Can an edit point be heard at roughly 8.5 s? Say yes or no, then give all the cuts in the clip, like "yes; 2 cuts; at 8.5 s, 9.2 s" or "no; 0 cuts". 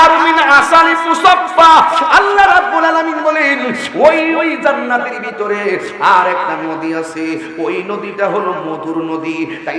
no; 0 cuts